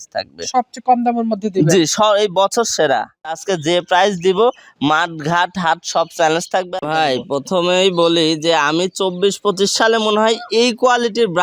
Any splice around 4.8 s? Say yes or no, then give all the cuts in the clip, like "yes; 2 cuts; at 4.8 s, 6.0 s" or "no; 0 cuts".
no; 2 cuts; at 3.5 s, 6.7 s